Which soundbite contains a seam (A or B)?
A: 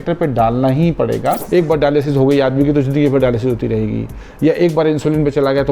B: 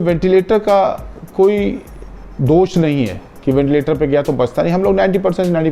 A